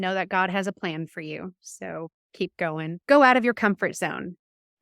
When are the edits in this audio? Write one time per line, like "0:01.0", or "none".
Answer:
0:02.9